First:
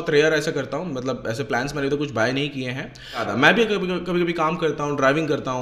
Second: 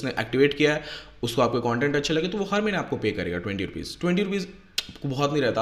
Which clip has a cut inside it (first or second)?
first